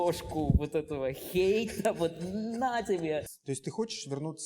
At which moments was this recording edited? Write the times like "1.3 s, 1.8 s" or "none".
3.2 s